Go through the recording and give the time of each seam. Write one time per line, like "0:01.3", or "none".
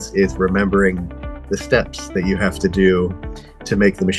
none

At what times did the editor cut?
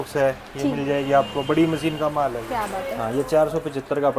0:02.4

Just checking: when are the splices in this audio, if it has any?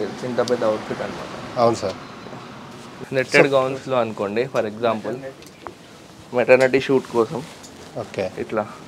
none

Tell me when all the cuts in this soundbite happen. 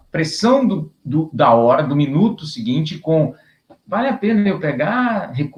none

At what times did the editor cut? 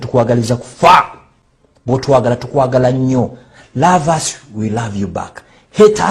0:01.2

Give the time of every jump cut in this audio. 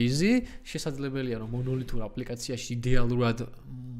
none

